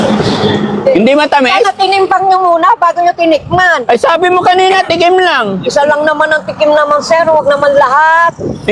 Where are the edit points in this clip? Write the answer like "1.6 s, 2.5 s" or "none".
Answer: none